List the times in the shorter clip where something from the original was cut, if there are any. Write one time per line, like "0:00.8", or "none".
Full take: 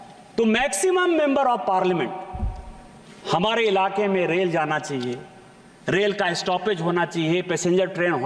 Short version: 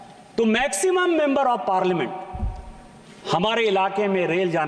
none